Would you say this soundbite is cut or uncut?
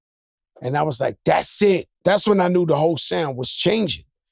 cut